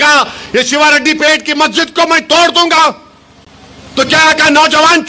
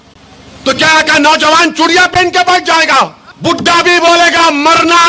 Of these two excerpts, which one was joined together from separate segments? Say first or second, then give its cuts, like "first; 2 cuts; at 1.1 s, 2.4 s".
second; 1 cut; at 3.3 s